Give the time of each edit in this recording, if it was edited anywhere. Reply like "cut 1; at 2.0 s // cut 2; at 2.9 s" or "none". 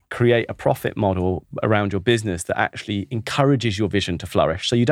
none